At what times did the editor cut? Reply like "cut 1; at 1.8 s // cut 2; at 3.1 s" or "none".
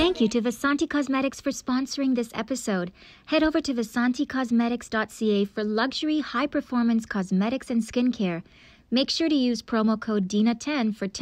none